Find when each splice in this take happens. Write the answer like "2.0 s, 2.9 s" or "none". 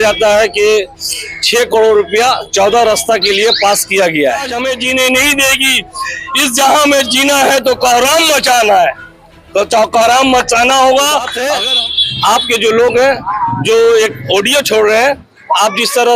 4.7 s, 11.4 s